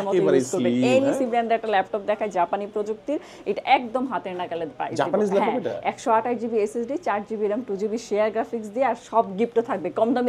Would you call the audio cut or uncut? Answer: uncut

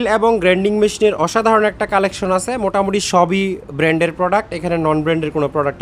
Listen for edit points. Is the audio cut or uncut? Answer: uncut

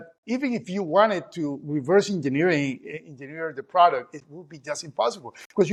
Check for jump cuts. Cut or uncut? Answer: uncut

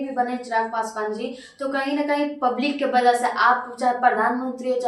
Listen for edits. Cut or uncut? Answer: uncut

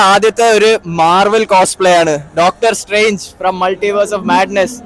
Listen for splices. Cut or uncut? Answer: uncut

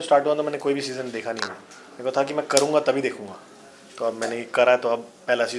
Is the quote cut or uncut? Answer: uncut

